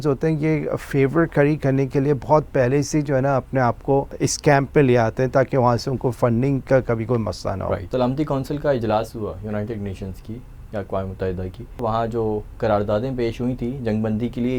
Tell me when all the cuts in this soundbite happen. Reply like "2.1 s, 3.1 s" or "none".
4.1 s, 7.9 s, 11.8 s